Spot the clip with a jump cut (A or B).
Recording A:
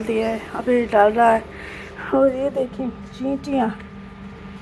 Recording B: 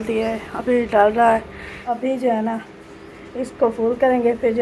B